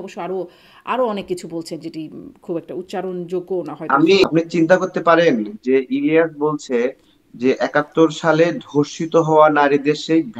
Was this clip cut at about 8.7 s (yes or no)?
no